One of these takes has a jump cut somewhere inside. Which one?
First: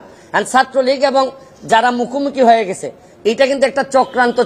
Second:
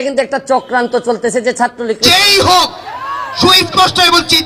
second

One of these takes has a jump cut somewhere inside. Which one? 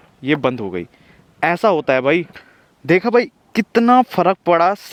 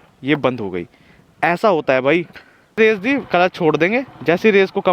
second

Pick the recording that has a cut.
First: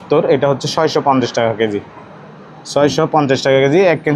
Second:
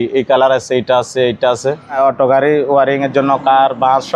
second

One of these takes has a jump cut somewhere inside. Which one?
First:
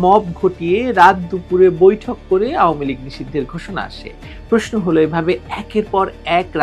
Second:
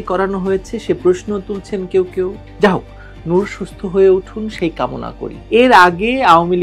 second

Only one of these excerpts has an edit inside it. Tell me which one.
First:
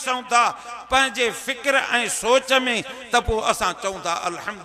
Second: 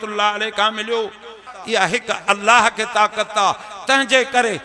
second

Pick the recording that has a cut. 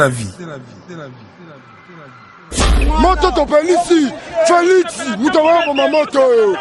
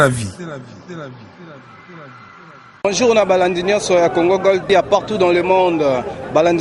first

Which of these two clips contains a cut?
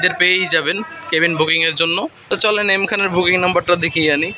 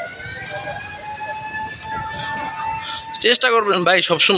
first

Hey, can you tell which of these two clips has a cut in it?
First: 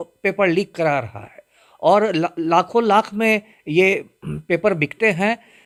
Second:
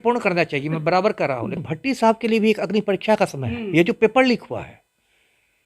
second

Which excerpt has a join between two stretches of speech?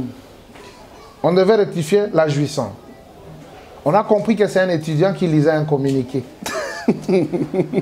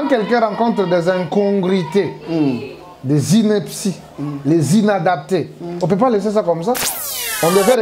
second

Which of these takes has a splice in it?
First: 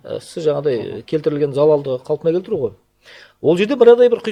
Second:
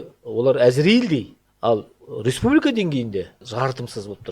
second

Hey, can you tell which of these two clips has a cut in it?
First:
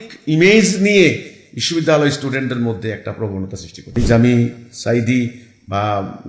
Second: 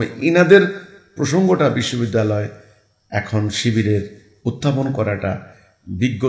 first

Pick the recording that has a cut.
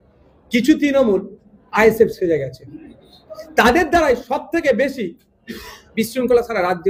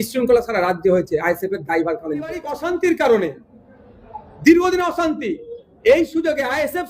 second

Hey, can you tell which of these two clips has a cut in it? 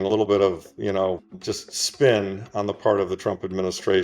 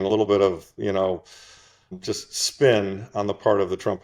first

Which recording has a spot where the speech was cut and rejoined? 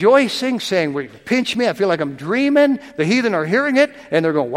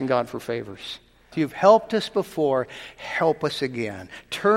second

